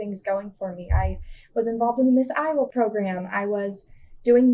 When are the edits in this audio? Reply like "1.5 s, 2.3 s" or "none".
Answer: 2.7 s